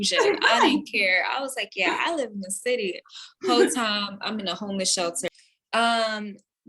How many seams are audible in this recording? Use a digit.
1